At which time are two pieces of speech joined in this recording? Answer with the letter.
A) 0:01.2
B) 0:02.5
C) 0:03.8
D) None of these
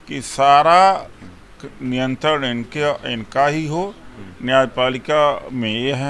D